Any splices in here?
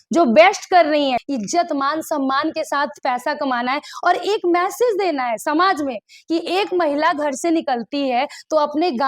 yes; 1 cut; at 1.2 s

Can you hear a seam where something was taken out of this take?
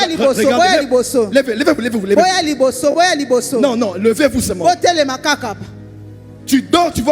no; 0 cuts

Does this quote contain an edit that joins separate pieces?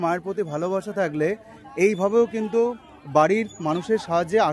no; 0 cuts

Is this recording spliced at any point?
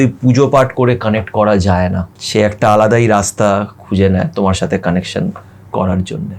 yes; 1 cut; at 2.1 s

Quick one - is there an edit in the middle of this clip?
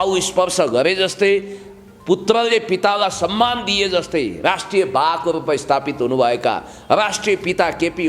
no; 0 cuts

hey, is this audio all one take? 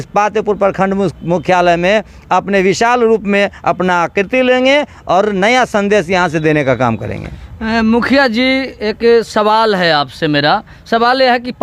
yes; 0 cuts

